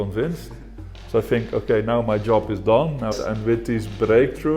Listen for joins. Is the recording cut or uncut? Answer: cut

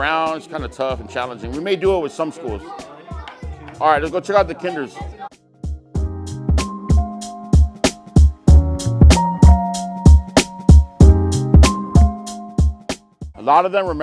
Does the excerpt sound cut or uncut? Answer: uncut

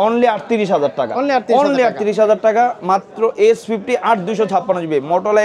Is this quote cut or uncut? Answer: uncut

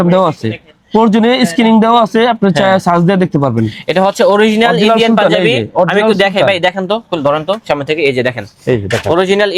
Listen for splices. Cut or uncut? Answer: uncut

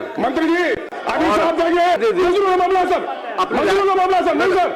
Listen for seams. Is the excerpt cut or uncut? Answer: cut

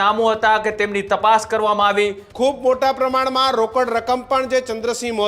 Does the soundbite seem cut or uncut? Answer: cut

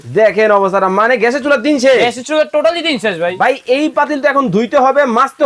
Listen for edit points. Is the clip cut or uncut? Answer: cut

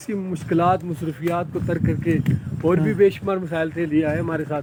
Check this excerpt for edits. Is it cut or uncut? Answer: uncut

